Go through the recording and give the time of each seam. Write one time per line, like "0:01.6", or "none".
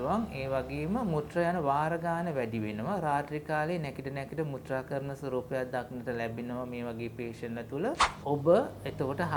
0:08.0